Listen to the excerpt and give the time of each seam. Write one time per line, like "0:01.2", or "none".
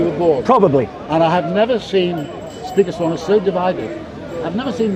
none